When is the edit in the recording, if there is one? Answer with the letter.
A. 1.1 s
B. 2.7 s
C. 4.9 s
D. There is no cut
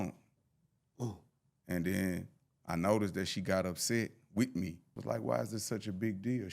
C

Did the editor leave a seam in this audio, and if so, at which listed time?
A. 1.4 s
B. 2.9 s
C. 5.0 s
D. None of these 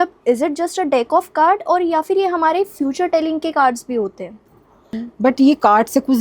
C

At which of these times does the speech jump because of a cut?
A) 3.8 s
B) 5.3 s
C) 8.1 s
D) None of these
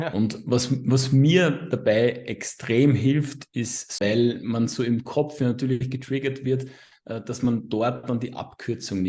A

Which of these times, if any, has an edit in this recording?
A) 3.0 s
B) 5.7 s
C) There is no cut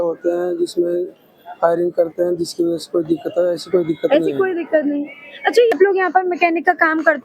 B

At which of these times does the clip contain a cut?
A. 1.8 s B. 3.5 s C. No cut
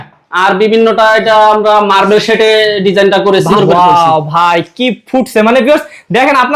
B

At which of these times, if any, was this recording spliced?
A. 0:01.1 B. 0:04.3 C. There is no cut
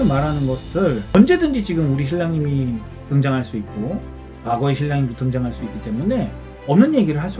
A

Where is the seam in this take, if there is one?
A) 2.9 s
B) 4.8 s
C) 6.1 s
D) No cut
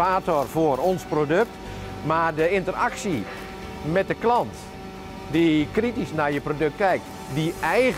C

